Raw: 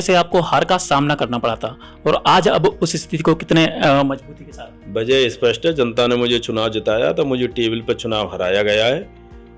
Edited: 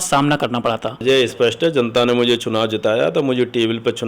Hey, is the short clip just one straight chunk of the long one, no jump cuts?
no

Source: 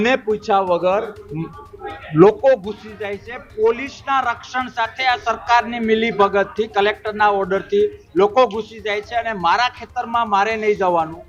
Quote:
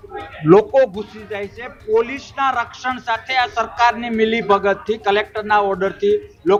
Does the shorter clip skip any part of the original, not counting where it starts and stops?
no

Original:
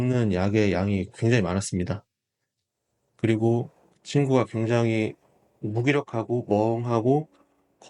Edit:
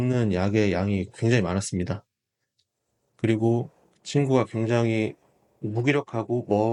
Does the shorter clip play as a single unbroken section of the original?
yes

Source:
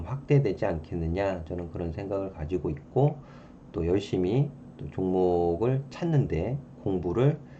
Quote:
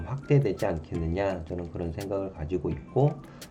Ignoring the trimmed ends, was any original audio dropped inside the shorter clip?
no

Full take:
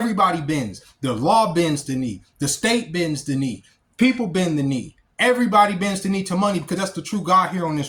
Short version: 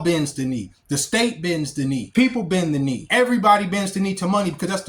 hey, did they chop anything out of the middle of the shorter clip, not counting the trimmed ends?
yes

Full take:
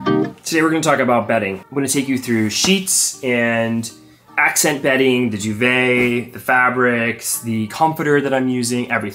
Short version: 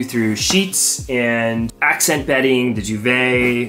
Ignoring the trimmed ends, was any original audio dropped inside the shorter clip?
yes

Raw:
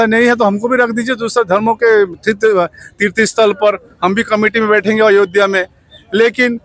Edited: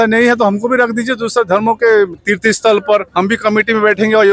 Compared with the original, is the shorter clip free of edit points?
no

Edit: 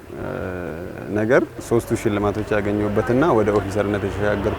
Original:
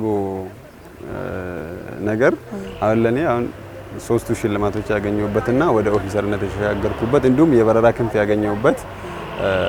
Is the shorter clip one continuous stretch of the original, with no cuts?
no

